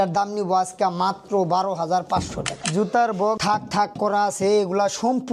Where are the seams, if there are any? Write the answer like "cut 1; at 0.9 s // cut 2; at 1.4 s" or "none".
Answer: cut 1; at 2.6 s // cut 2; at 3.4 s

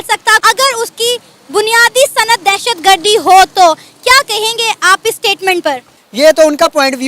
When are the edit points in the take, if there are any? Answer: cut 1; at 6.0 s

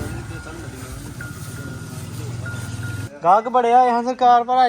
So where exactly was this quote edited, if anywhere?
cut 1; at 3.1 s

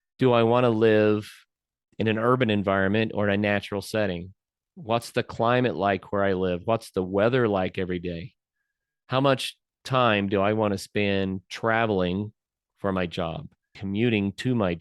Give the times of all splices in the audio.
cut 1; at 13.8 s

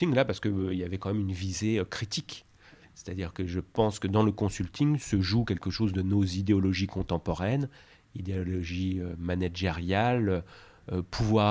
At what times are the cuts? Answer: none

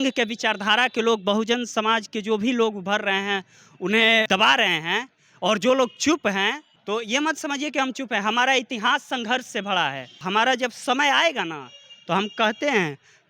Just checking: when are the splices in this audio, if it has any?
cut 1; at 4.3 s // cut 2; at 6.7 s // cut 3; at 10.2 s

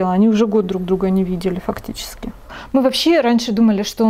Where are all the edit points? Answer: cut 1; at 2.5 s

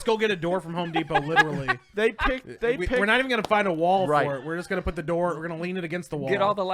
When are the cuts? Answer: none

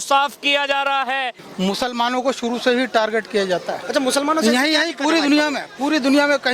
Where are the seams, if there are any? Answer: cut 1; at 1.4 s

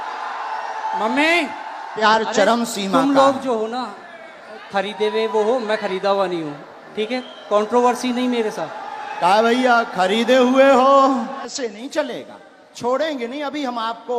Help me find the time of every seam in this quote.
cut 1; at 2.0 s // cut 2; at 11.5 s

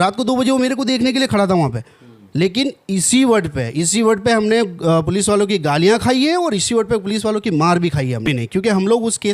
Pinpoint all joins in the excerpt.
cut 1; at 8.2 s

